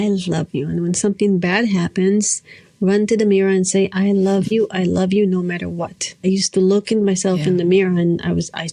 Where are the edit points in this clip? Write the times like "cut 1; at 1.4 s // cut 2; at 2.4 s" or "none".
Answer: cut 1; at 6.2 s